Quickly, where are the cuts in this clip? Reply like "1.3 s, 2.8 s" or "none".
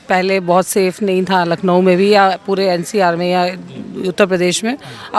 none